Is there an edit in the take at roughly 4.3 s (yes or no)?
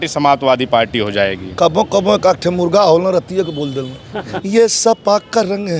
yes